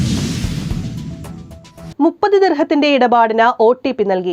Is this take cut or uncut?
cut